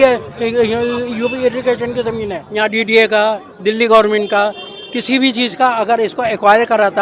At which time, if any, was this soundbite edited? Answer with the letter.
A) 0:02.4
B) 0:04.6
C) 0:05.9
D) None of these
A